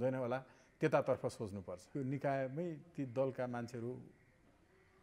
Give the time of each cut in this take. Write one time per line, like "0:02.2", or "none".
0:01.8

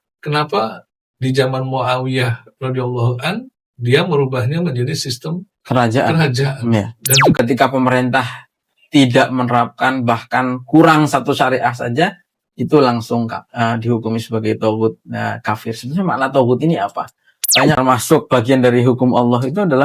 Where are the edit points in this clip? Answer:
0:07.3
0:17.8

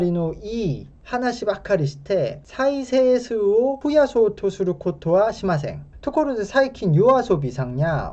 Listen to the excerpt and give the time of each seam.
0:03.8

